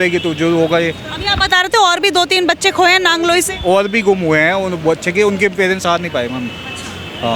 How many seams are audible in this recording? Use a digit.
0